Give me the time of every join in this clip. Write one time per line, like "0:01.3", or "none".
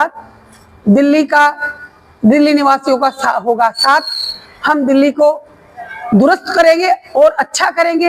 none

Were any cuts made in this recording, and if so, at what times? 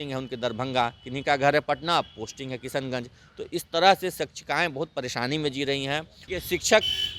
0:06.2

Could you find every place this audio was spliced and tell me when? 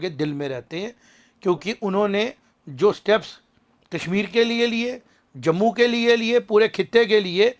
none

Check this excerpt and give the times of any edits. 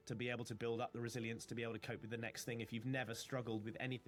none

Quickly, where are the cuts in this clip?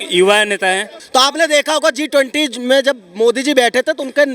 0:00.9

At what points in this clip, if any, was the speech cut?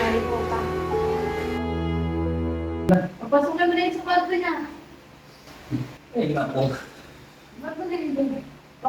0:02.9

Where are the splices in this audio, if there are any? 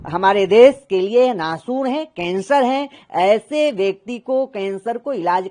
none

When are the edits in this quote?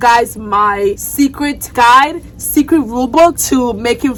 none

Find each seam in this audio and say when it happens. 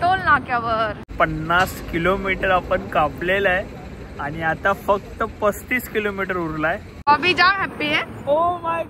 0:01.0
0:06.9

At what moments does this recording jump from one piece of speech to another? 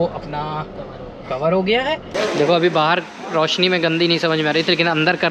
0:02.1

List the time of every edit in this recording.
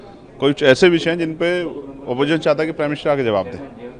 none

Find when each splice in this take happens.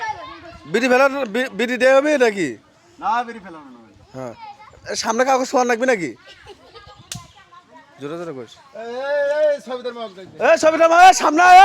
none

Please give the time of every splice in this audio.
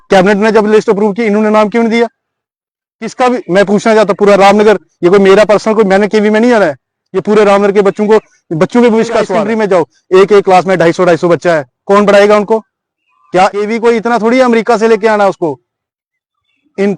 0:09.3
0:13.5

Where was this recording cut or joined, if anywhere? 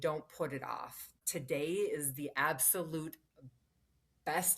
0:01.2

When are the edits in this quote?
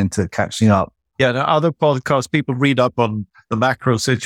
0:01.0

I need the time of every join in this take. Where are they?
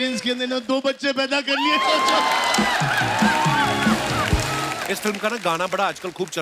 0:04.7

